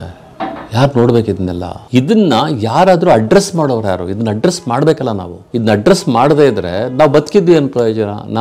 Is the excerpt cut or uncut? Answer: cut